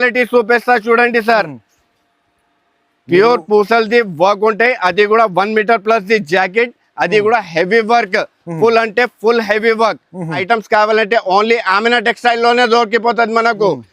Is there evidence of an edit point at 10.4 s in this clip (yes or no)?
yes